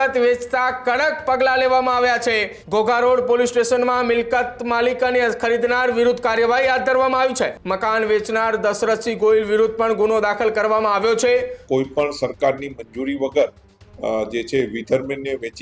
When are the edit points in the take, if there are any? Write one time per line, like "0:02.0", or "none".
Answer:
0:02.5
0:07.6
0:11.6